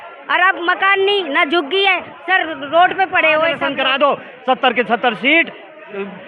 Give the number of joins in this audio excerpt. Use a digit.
1